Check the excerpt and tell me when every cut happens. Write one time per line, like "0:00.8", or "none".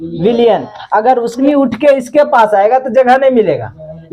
0:01.4